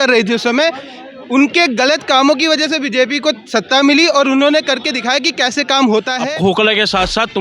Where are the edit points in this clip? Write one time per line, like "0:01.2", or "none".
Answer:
0:06.2